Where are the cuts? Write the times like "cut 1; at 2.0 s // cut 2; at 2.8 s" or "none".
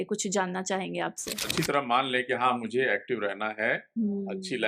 cut 1; at 1.4 s